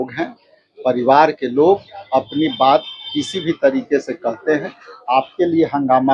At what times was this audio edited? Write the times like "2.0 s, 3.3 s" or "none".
none